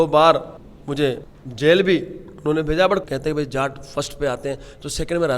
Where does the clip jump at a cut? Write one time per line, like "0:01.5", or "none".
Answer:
0:03.0